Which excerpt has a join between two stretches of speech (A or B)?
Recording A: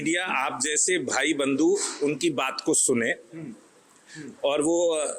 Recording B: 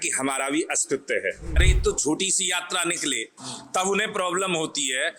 B